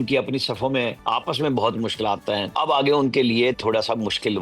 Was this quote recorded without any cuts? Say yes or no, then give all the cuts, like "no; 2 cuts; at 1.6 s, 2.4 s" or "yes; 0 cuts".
no; 2 cuts; at 1.0 s, 2.5 s